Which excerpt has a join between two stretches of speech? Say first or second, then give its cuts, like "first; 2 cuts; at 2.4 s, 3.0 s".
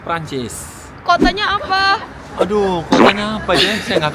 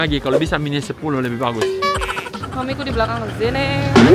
second; 1 cut; at 2.4 s